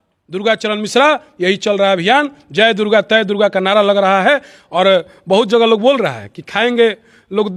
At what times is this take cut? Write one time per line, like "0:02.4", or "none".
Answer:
none